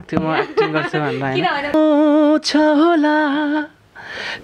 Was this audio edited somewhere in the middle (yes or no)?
yes